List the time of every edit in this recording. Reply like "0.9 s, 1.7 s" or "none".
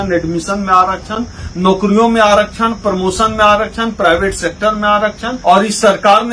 5.3 s